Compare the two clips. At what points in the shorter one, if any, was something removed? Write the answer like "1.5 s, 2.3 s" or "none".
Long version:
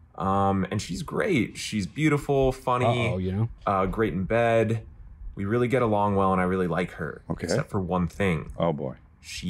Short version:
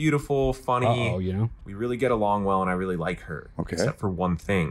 1.5 s